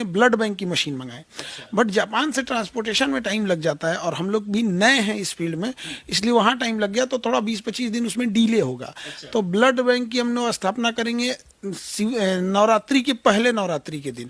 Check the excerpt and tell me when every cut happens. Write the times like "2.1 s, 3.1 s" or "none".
none